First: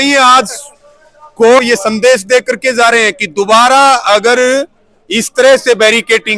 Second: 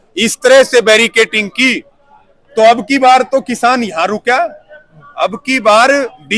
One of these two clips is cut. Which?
first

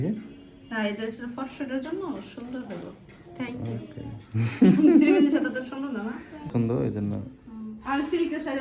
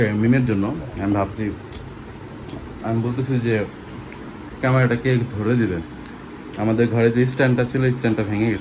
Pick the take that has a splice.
first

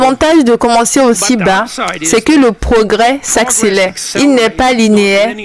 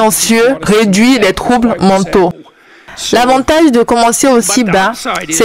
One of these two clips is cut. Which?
second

